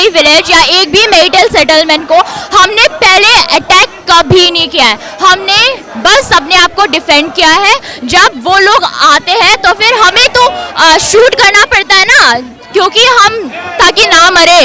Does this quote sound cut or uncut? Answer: uncut